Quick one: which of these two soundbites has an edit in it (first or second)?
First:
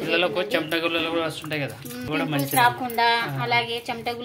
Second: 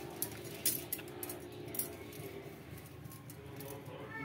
first